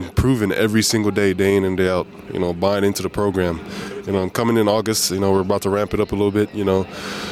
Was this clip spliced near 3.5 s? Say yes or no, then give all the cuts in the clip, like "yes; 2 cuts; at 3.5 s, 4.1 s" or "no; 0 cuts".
no; 0 cuts